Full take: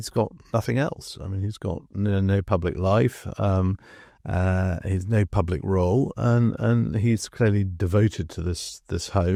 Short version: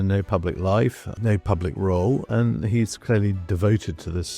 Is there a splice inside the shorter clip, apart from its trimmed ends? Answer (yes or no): yes